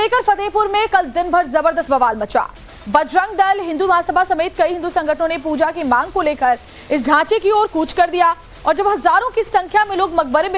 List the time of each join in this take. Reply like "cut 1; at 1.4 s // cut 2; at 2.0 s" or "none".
cut 1; at 1.1 s